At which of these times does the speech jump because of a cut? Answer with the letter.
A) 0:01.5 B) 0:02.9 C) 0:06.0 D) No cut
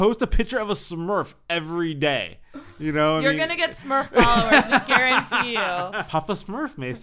C